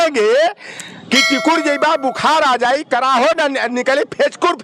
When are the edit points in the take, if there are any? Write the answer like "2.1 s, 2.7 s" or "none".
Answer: none